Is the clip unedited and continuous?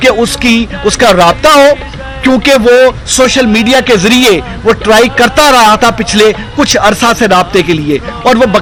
yes; 0 cuts

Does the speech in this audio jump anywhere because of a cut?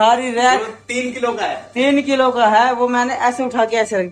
no; 0 cuts

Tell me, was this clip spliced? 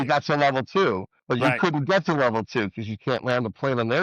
yes; 1 cut; at 1.1 s

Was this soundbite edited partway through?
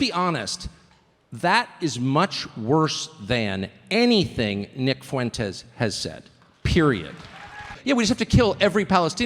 yes; 1 cut; at 7.7 s

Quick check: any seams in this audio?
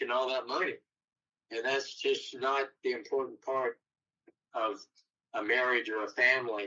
no; 0 cuts

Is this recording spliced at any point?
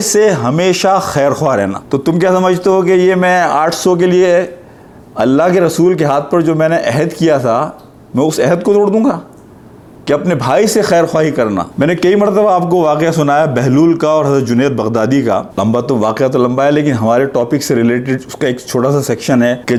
no; 0 cuts

